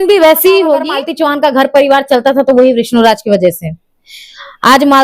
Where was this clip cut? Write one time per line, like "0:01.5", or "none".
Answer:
0:01.0